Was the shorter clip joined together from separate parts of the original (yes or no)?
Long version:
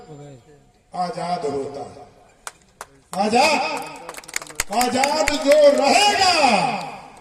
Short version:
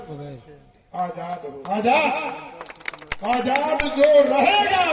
yes